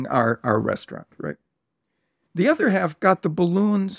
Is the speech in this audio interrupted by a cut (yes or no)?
no